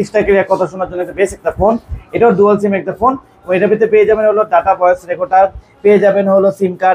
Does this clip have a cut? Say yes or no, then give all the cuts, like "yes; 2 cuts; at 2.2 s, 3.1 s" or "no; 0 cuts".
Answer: no; 0 cuts